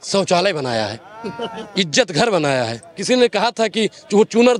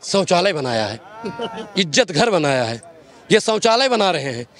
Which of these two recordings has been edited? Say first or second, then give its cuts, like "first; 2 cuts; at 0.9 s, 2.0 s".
first; 1 cut; at 2.9 s